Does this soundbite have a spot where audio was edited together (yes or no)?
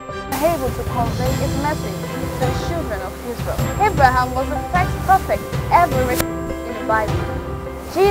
no